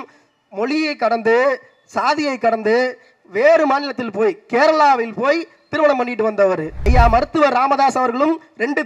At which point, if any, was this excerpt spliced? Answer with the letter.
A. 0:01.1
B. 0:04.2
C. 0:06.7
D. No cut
C